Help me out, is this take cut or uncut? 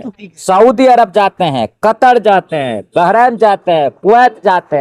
uncut